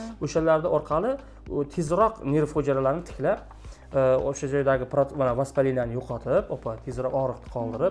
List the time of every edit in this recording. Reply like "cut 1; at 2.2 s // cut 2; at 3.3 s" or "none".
none